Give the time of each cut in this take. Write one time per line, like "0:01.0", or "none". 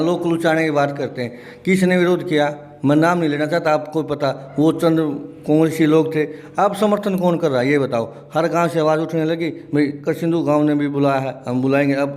none